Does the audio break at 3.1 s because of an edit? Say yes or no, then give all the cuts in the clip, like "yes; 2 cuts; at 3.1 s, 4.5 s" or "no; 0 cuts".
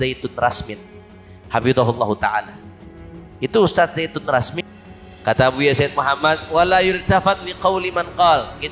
no; 1 cut; at 4.5 s